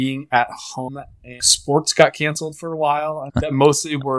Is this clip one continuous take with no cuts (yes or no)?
no